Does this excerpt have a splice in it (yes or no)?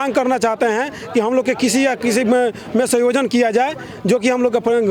no